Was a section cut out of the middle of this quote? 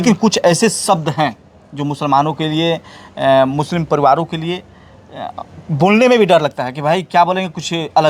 no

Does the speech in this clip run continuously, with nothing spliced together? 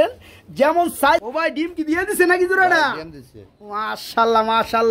no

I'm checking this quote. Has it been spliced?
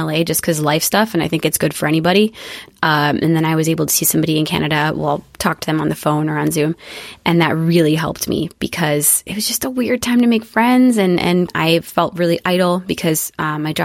yes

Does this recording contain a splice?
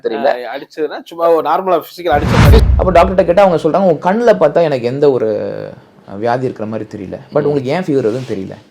yes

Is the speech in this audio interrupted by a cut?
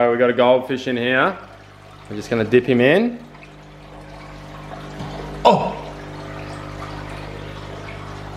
no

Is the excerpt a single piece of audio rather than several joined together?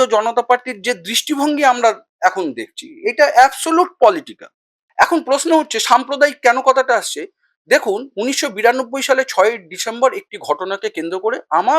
no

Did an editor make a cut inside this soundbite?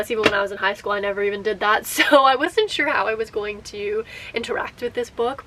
no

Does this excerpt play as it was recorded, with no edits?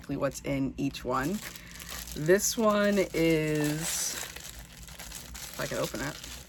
yes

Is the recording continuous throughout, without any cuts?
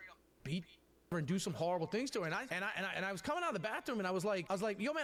yes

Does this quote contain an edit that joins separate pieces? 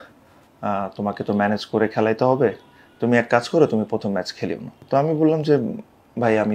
yes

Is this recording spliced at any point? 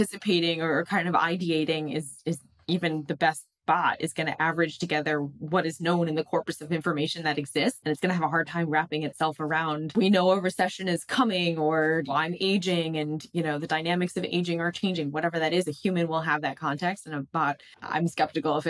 yes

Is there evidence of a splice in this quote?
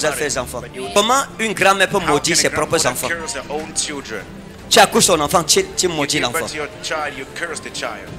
yes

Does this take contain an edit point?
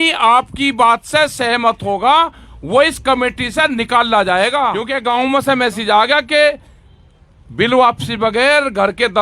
yes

